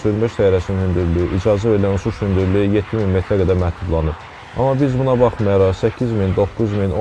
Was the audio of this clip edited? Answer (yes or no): no